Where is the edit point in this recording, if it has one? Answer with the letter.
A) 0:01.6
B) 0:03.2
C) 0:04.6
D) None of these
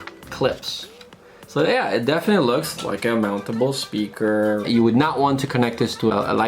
C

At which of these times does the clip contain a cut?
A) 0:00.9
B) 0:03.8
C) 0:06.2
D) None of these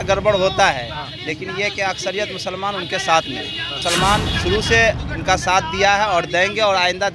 B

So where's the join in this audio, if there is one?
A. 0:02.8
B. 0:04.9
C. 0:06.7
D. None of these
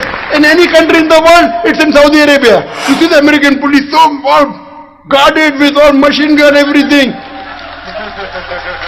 A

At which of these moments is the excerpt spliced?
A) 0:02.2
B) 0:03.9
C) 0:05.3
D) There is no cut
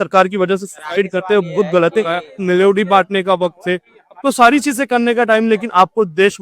A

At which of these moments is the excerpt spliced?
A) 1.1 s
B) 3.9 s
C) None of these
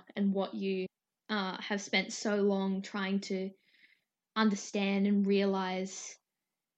A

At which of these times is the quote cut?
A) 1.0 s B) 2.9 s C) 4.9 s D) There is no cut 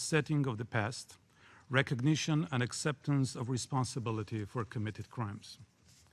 D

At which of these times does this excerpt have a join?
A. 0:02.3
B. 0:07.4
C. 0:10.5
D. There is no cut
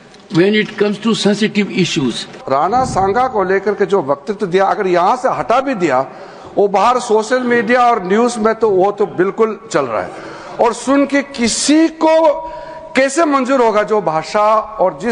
A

